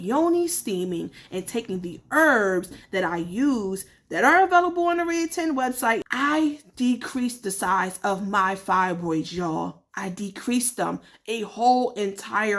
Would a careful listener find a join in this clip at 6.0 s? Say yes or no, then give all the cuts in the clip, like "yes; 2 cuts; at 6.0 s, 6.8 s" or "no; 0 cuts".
yes; 1 cut; at 6.0 s